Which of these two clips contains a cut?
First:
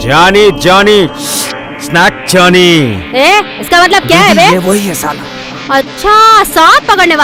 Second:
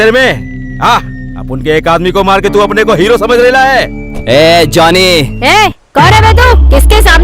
second; 1 cut; at 5.3 s

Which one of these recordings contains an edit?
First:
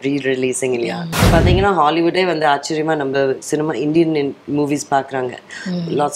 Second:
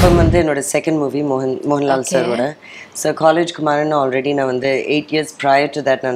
first; 1 cut; at 1.2 s

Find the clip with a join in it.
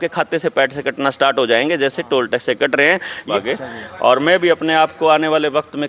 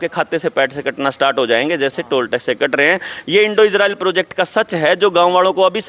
first; 1 cut; at 3.3 s

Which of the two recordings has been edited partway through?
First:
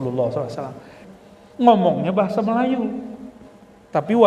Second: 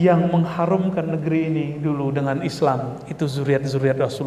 first; 1 cut; at 1.0 s

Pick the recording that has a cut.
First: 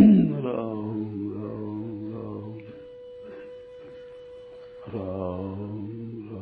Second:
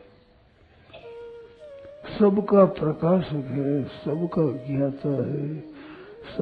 first; 2 cuts; at 2.5 s, 4.6 s

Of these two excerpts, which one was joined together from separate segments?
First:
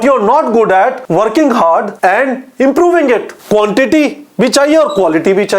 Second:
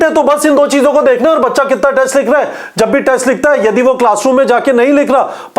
first; 3 cuts; at 1.0 s, 1.9 s, 3.3 s

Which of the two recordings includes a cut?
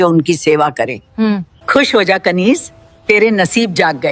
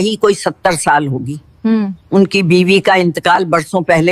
first; 1 cut; at 1.2 s

